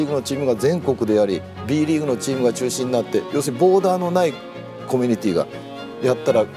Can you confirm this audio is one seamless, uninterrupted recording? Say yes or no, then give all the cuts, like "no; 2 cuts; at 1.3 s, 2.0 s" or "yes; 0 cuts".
yes; 0 cuts